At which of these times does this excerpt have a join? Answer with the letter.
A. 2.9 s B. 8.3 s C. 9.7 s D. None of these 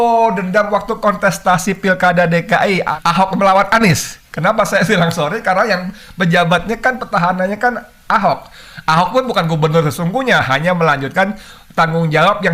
A